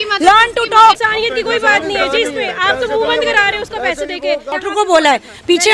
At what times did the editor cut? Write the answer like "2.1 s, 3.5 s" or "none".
1.0 s, 4.5 s